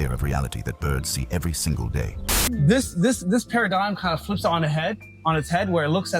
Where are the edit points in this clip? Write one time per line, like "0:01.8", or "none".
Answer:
0:02.5